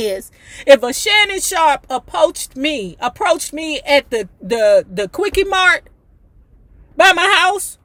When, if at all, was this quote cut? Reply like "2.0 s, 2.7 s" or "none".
none